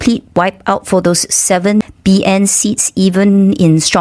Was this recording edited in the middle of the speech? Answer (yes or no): no